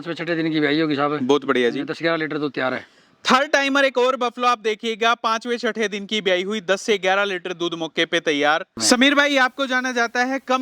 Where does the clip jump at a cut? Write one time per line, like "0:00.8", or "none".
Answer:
0:08.8